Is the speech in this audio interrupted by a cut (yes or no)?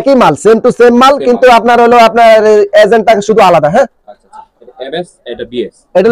no